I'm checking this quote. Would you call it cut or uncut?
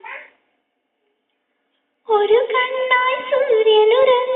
uncut